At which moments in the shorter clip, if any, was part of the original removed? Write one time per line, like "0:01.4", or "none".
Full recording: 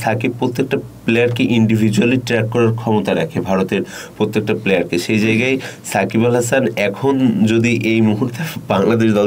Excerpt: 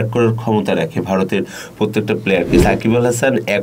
0:02.6